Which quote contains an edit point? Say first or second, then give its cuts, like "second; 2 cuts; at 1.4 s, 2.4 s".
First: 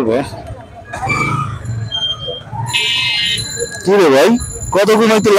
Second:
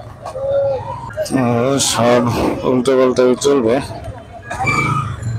second; 1 cut; at 1.0 s